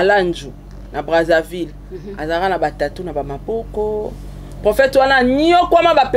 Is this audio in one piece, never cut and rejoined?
yes; 0 cuts

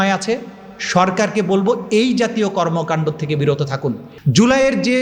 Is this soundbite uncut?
no; 1 cut; at 4.1 s

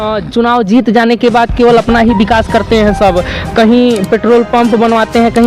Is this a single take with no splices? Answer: yes; 0 cuts

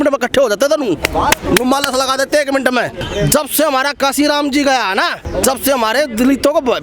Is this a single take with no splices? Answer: no; 2 cuts; at 2.9 s, 5.2 s

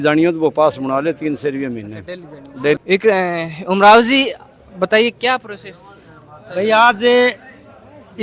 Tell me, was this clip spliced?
yes; 1 cut; at 2.8 s

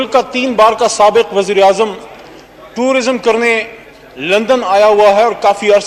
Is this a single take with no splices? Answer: yes; 0 cuts

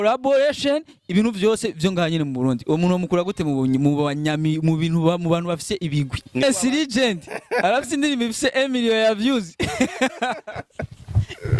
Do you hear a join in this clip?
yes; 1 cut; at 6.4 s

